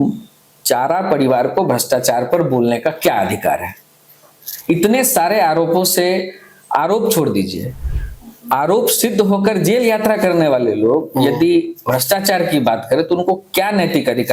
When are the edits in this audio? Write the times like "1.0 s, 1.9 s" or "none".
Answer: none